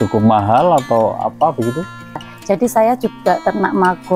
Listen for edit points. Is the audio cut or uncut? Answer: cut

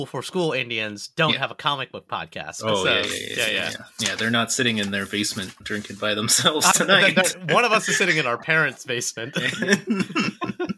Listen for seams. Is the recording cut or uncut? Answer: cut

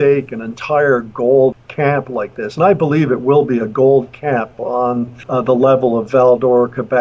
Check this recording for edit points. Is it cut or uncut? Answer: cut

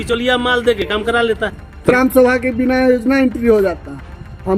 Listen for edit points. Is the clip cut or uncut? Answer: cut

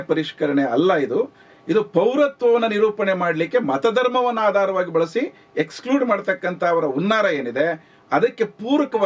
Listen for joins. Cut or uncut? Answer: uncut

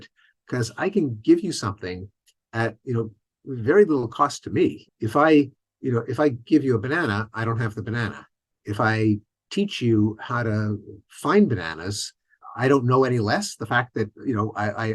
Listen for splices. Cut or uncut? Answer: cut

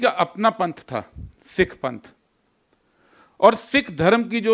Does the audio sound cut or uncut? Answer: uncut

